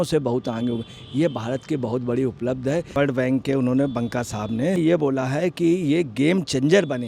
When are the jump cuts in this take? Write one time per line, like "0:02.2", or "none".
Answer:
0:02.9
0:04.8

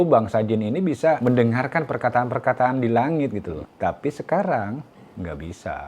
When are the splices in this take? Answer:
0:01.2
0:03.6

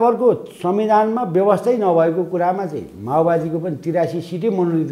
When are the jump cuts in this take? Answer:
none

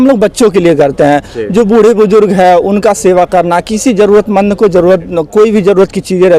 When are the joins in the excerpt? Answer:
none

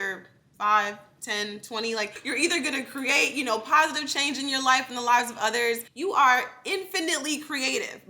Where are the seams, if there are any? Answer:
0:02.2
0:05.9

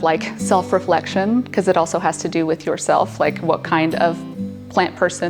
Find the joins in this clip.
0:02.1

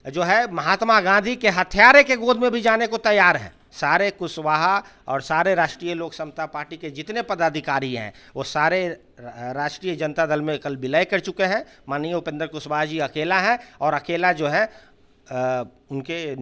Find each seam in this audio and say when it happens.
0:03.7

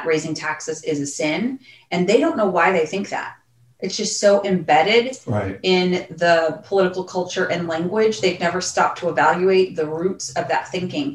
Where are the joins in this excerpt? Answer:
none

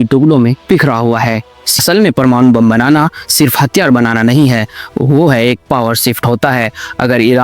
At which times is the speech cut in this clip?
0:01.6

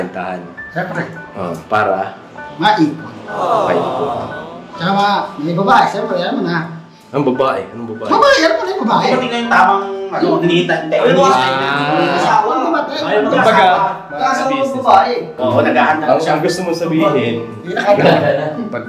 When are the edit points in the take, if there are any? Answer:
none

